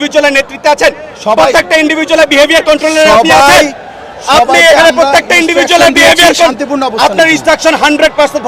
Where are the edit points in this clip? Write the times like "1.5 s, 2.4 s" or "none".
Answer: none